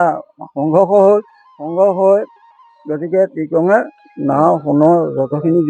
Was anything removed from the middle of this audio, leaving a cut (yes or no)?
yes